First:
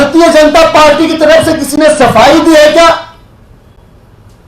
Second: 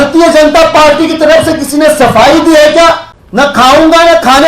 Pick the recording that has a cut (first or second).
second